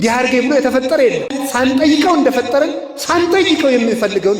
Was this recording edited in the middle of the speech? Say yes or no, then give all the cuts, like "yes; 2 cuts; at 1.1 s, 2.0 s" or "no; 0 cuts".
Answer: yes; 1 cut; at 1.4 s